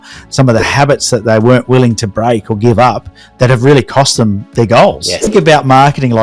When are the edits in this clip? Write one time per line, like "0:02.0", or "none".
0:05.3